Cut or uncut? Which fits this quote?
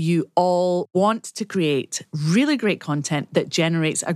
cut